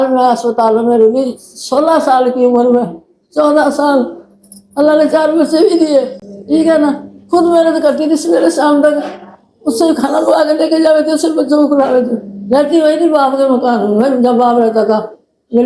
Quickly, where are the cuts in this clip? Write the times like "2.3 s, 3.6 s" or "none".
none